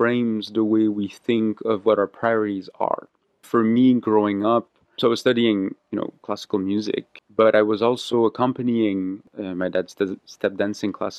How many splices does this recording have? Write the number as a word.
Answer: four